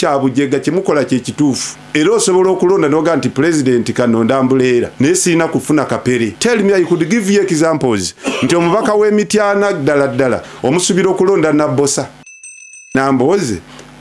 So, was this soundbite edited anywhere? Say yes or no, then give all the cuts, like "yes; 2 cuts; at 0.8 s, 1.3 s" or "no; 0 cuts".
yes; 4 cuts; at 1.7 s, 4.9 s, 6.3 s, 12.3 s